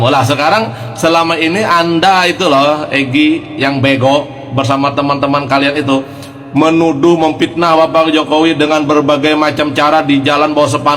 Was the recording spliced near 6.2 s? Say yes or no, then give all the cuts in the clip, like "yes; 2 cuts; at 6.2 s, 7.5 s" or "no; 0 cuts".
no; 0 cuts